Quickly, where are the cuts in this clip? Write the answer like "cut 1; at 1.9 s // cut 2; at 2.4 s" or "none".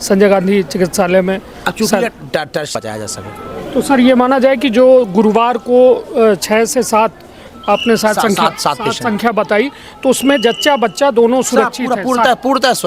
cut 1; at 2.7 s